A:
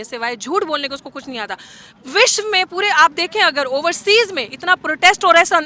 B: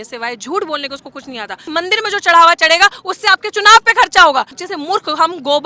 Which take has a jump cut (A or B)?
B